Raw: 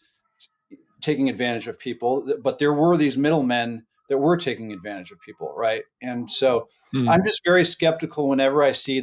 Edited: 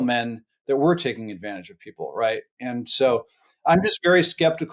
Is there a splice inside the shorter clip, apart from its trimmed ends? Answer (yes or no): no